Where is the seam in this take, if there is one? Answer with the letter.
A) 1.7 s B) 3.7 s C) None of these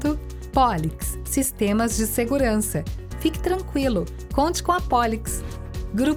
C